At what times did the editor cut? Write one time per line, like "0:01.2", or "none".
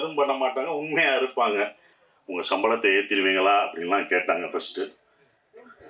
0:01.9